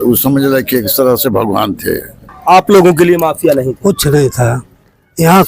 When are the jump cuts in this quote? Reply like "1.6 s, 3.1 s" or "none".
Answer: 2.2 s